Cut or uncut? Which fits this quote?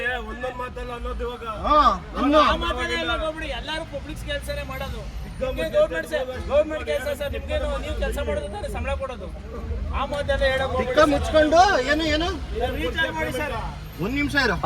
uncut